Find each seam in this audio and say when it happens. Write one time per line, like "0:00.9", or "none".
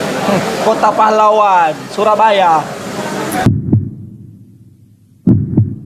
none